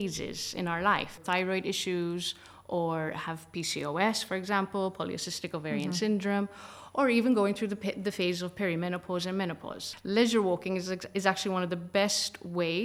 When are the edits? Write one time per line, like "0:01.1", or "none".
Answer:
0:01.2
0:09.9